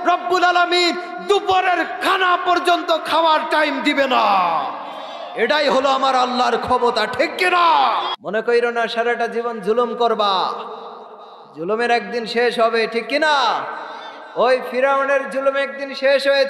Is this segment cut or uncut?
cut